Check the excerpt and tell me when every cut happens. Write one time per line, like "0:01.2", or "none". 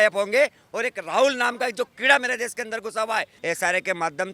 0:03.3